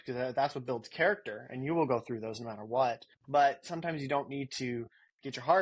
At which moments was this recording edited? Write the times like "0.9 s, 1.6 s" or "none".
3.1 s

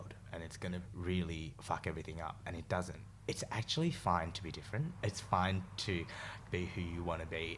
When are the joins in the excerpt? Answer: 0.9 s, 1.5 s, 3.0 s, 5.1 s, 6.4 s

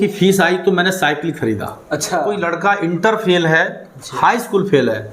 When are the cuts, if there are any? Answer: 2.4 s

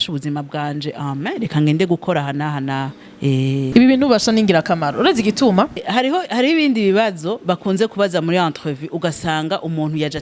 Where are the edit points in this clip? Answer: 5.8 s

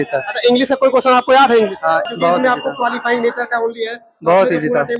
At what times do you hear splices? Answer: 2.1 s

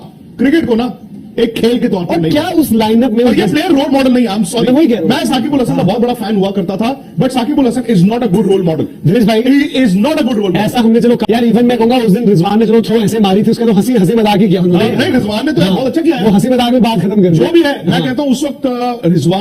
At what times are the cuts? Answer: 11.2 s

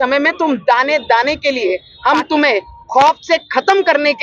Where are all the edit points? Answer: 1.9 s

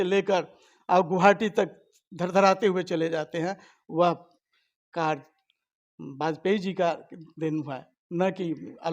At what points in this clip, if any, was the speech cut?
none

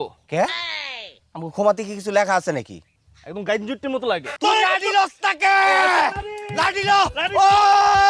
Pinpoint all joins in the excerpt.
4.3 s

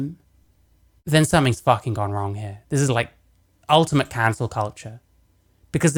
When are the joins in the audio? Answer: none

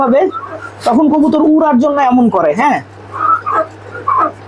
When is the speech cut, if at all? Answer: none

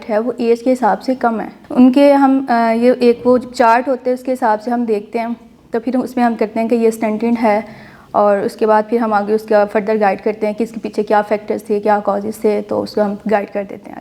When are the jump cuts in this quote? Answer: none

